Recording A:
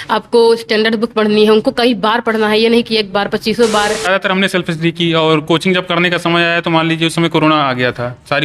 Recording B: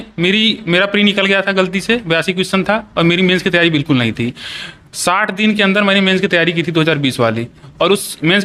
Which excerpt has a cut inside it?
A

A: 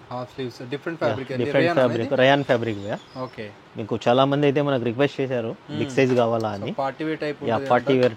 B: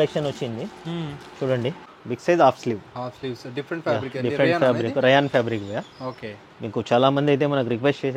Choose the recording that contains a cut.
B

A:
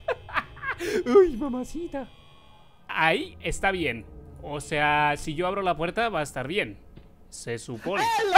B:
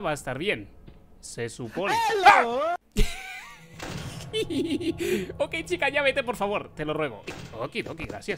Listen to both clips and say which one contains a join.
B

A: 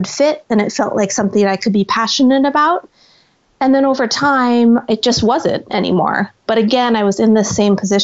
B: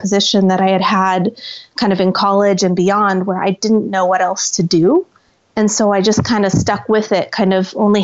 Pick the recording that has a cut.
A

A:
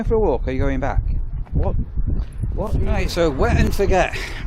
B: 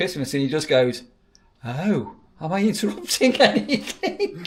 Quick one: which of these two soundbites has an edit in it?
A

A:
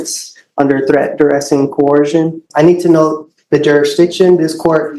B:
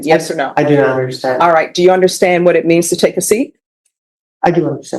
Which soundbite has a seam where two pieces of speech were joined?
A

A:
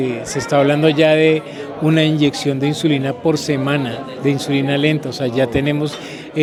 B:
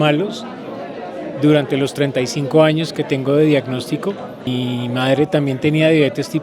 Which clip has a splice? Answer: B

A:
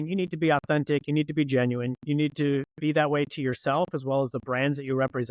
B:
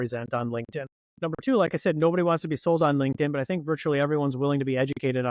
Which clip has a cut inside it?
B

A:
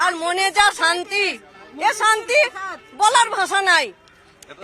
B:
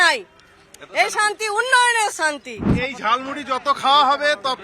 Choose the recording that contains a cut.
B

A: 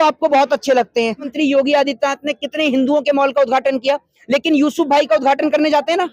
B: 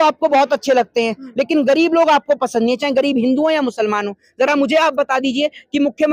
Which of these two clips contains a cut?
A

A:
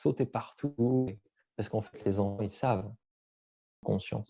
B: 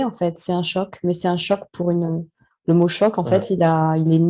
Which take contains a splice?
A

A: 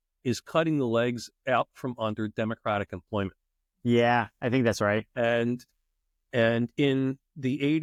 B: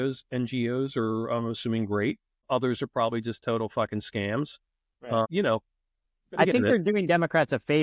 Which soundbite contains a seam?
B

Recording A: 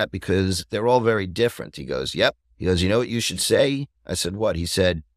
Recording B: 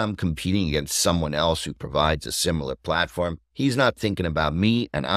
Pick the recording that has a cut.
A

